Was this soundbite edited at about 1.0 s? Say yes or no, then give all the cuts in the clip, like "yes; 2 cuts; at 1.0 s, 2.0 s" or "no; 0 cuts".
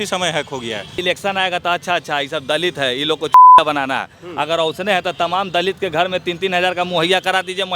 yes; 1 cut; at 1.0 s